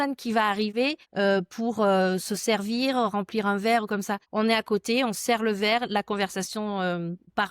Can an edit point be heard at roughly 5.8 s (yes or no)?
no